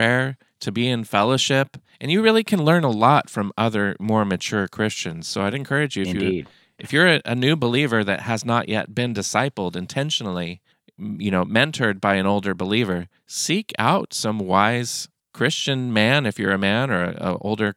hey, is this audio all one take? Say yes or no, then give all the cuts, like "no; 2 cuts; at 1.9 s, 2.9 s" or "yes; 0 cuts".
yes; 0 cuts